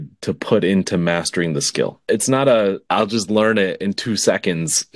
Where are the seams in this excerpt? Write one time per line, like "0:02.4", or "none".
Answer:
0:02.0
0:02.8